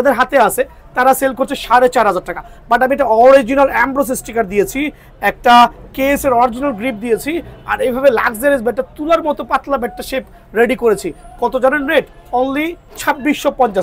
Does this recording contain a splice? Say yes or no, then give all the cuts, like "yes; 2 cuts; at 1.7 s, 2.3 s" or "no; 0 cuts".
yes; 1 cut; at 12.9 s